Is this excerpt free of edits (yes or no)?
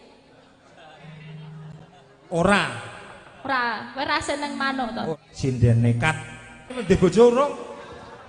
no